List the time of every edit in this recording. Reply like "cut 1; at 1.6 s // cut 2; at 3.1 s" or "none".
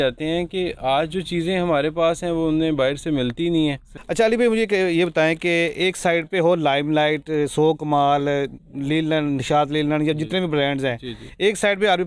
cut 1; at 3.9 s